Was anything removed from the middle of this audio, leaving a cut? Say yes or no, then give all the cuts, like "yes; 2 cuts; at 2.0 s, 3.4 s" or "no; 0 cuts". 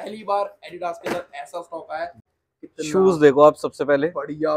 yes; 1 cut; at 2.1 s